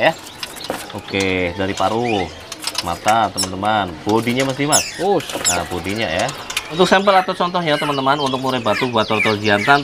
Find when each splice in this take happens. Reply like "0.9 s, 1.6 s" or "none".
6.6 s